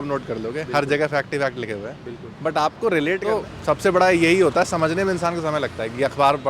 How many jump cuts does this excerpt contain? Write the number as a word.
one